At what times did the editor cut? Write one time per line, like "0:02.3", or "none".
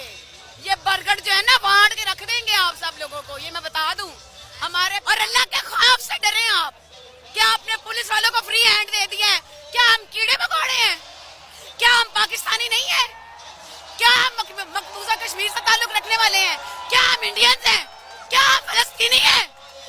0:05.0